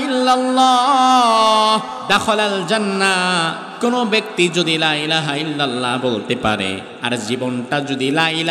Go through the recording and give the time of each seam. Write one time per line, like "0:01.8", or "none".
0:02.0
0:03.6
0:06.9